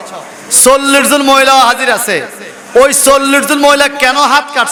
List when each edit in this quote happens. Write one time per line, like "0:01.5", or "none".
none